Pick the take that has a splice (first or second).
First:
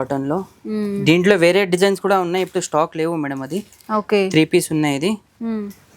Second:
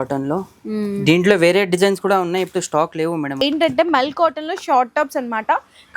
second